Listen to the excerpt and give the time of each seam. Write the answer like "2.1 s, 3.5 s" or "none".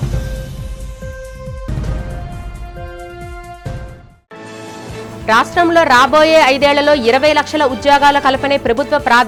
none